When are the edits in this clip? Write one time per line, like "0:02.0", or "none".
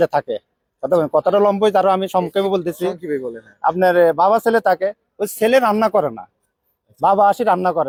none